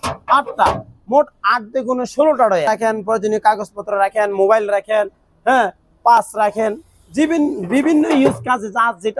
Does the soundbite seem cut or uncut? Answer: cut